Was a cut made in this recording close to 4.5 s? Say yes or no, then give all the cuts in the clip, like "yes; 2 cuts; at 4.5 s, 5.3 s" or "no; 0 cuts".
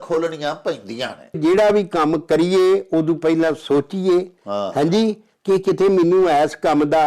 no; 1 cut; at 1.4 s